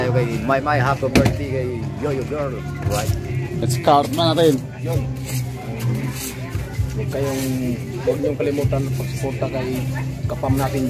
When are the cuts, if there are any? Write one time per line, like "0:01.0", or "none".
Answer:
none

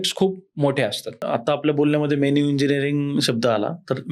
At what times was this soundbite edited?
0:01.2

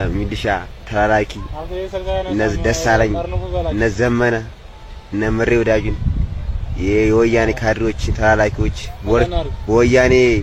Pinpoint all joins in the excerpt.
none

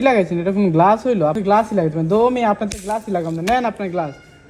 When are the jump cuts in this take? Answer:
0:01.4

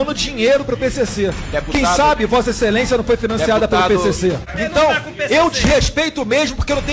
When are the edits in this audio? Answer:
0:04.4

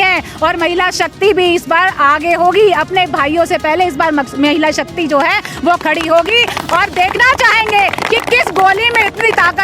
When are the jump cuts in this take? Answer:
none

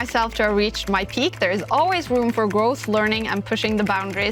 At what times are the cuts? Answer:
none

